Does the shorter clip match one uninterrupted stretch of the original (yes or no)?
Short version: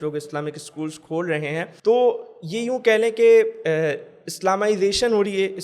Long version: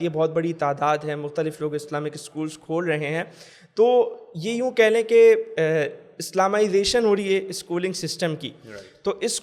no